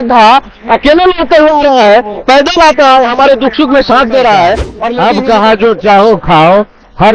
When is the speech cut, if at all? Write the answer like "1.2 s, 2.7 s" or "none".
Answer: 4.8 s